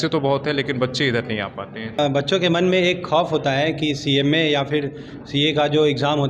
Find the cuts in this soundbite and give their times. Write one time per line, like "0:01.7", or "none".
0:02.0